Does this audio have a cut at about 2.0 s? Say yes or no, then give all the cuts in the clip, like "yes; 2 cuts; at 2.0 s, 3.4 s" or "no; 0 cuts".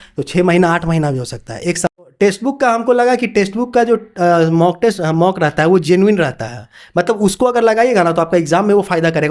yes; 1 cut; at 2.0 s